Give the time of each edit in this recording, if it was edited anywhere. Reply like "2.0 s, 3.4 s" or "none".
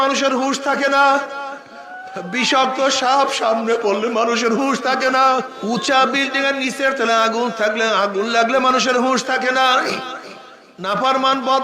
5.5 s